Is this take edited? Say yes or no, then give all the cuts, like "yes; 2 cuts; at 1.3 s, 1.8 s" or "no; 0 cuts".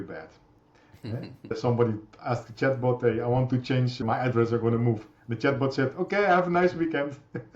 yes; 2 cuts; at 1.5 s, 4.0 s